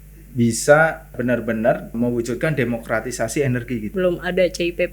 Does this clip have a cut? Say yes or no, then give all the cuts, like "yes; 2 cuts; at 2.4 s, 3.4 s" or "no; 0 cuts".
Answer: yes; 3 cuts; at 1.1 s, 1.9 s, 3.9 s